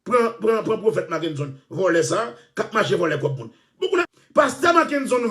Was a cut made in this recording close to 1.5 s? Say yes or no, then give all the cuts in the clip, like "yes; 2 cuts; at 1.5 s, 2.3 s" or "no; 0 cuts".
no; 1 cut; at 4.1 s